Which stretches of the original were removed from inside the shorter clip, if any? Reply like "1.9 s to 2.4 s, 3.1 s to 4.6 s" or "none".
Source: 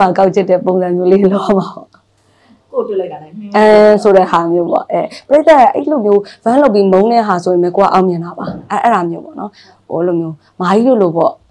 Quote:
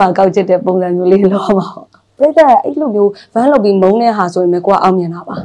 2.0 s to 5.1 s